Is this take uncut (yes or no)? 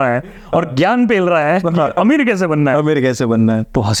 yes